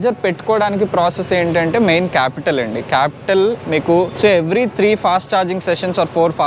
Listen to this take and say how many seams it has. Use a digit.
1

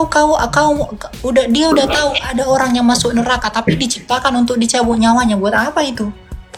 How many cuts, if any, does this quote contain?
0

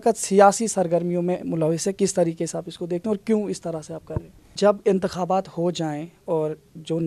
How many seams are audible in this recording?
1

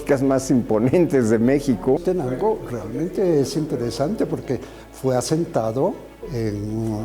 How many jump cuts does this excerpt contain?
1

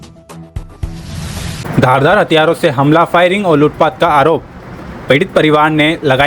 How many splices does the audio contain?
1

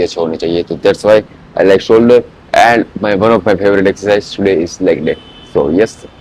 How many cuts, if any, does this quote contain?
0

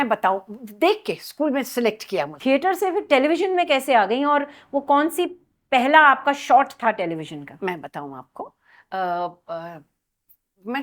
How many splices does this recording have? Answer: 1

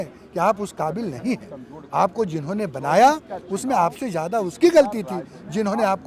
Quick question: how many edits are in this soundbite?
0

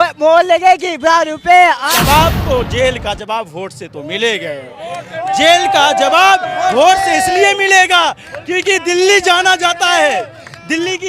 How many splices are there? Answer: 1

